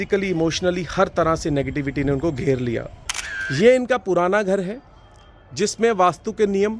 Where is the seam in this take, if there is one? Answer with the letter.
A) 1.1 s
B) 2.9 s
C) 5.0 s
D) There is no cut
B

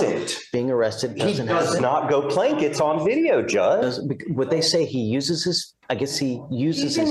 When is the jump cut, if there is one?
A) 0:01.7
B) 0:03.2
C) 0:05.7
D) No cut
D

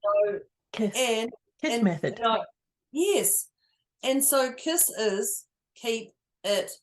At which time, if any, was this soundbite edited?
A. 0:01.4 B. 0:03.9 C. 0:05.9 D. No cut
C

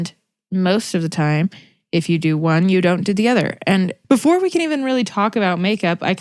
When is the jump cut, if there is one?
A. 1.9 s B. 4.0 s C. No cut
C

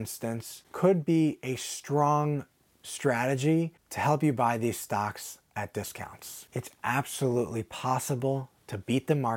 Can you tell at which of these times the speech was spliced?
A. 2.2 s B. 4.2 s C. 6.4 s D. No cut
C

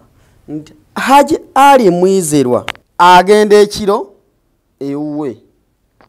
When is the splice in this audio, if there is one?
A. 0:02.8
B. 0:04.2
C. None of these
A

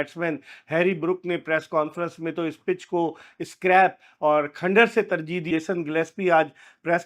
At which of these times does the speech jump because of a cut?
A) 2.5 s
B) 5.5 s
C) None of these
B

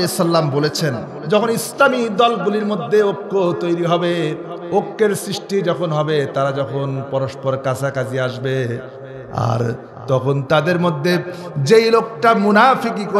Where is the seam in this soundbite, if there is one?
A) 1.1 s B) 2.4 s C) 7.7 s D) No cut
A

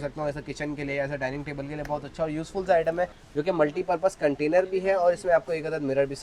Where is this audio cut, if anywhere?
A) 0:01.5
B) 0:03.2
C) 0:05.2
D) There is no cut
B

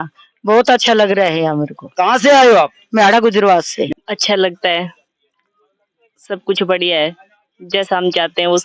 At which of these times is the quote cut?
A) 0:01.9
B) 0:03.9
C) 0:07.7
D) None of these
B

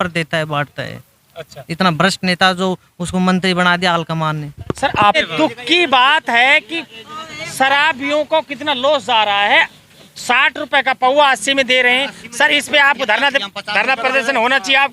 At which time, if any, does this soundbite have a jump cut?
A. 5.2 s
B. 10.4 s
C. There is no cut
A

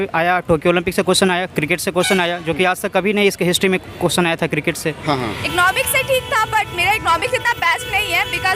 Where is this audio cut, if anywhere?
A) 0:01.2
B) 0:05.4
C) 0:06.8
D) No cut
B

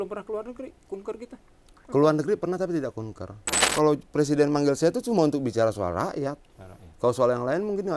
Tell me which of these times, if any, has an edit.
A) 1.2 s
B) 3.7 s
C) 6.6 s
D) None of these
B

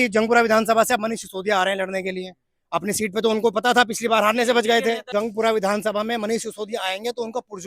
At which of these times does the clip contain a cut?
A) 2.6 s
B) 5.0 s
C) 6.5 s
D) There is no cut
B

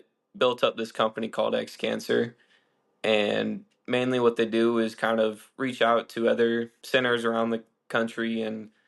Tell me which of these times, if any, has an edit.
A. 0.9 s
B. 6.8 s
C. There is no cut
B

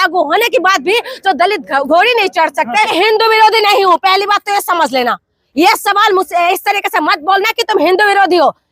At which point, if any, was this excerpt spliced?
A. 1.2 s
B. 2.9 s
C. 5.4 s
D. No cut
B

